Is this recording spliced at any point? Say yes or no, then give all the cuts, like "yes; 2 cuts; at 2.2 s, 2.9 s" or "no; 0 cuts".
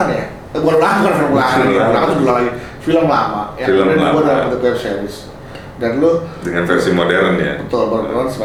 no; 0 cuts